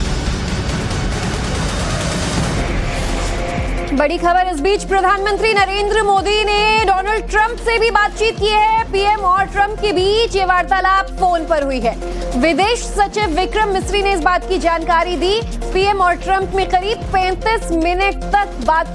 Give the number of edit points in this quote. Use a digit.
0